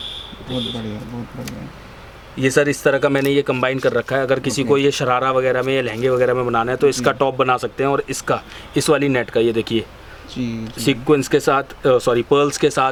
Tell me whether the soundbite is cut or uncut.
uncut